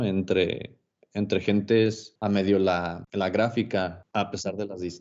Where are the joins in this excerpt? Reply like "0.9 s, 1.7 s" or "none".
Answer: 2.1 s, 3.0 s, 4.0 s